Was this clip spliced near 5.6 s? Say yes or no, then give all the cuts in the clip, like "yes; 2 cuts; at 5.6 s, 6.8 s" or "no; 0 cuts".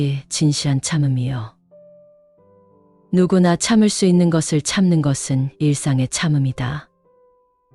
no; 1 cut; at 6.8 s